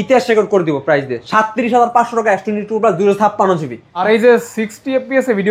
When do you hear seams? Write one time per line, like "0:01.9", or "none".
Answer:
0:03.9

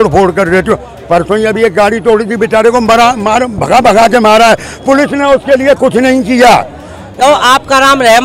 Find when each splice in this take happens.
0:07.2

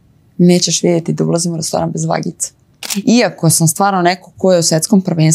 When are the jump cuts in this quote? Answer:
0:02.9

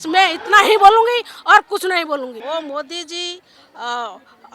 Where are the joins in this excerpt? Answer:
0:02.4

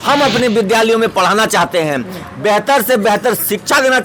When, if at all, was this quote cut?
none

